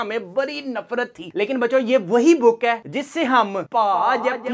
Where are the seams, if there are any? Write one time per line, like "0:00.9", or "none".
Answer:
none